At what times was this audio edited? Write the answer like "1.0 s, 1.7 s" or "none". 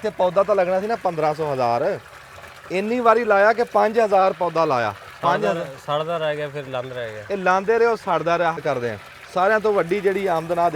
8.6 s